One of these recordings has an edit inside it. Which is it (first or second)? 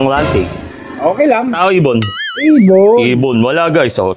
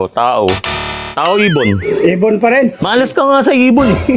second